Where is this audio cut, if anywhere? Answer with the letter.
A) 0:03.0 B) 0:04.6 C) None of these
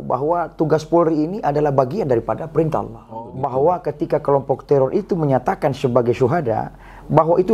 A